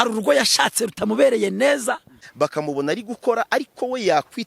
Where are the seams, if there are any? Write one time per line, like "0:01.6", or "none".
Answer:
0:02.2

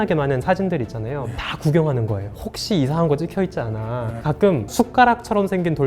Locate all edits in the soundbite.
0:04.1

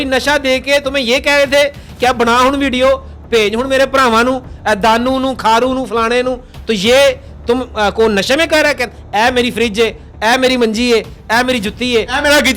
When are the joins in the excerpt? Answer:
none

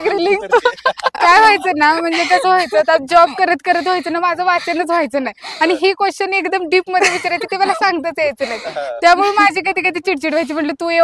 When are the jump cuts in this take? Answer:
none

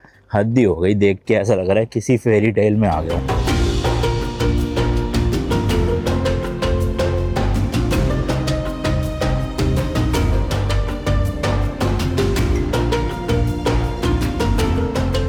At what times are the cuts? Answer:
none

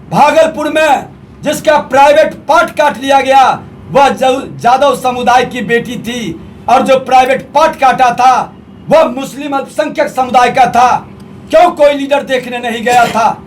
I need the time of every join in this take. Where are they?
none

